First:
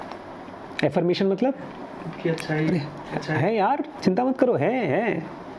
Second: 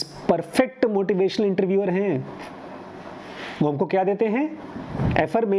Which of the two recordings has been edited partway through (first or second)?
first